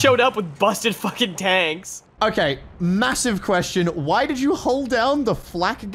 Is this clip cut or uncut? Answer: cut